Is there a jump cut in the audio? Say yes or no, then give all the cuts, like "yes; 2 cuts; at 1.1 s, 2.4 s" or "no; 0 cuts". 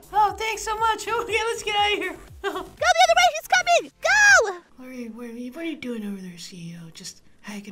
yes; 1 cut; at 4.6 s